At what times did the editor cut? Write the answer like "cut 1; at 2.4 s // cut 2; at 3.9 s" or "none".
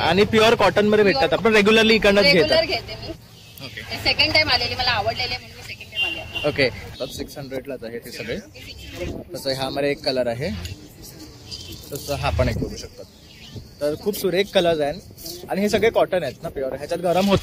cut 1; at 1.4 s // cut 2; at 6.9 s